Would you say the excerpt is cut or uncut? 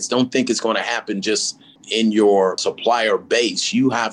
cut